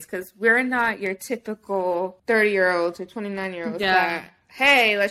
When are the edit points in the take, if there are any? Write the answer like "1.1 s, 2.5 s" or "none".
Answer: 2.2 s